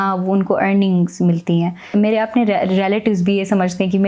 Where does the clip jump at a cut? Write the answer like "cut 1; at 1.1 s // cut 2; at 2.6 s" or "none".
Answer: cut 1; at 1.9 s